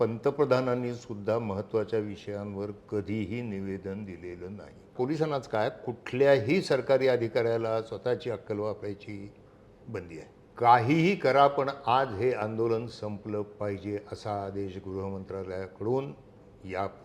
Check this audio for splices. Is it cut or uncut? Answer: cut